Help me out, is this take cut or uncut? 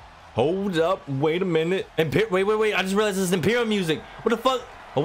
cut